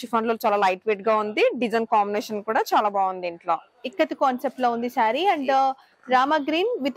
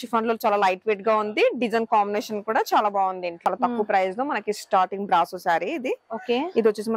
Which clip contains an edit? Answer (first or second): second